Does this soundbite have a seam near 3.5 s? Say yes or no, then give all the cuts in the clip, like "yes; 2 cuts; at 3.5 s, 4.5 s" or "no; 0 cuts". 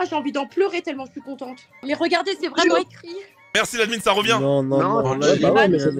yes; 1 cut; at 3.5 s